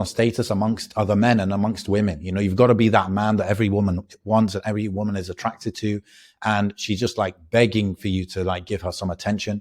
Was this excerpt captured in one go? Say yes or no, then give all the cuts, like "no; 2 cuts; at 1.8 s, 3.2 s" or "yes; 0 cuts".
yes; 0 cuts